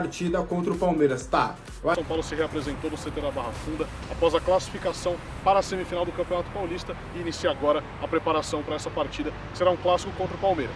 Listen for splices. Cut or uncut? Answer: cut